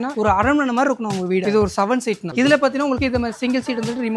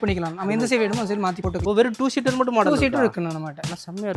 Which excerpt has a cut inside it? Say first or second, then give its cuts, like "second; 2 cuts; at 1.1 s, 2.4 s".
second; 1 cut; at 1.6 s